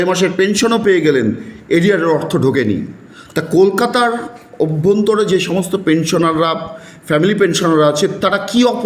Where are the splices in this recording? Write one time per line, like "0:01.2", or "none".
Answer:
none